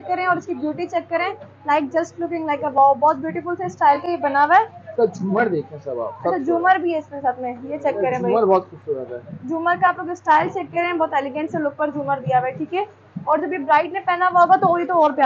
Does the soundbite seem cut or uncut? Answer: uncut